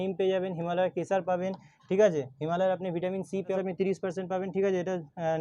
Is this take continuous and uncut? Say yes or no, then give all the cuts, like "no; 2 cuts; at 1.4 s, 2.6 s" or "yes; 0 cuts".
no; 1 cut; at 3.6 s